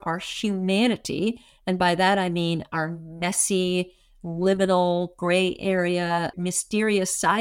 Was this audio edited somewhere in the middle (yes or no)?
no